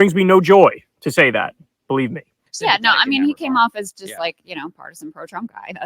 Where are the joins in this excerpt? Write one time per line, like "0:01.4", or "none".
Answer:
0:02.4